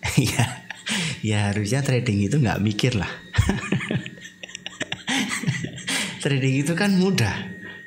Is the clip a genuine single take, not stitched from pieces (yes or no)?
yes